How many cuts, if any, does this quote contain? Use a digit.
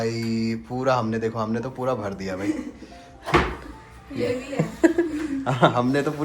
0